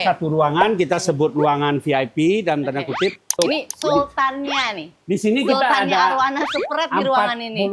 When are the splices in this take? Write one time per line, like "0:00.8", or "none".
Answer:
0:03.3